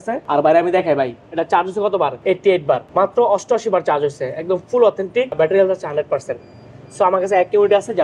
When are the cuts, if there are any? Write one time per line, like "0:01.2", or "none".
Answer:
none